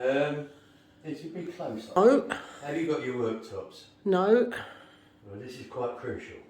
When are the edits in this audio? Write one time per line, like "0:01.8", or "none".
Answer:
0:02.0